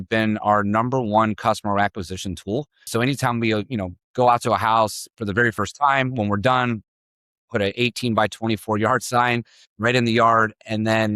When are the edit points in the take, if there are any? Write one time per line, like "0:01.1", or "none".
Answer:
0:02.9